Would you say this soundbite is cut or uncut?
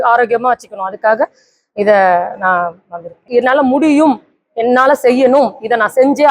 cut